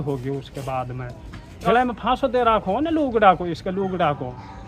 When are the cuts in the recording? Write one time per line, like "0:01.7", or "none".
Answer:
0:01.7